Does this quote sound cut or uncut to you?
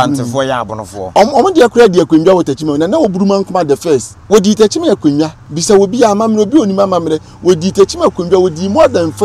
cut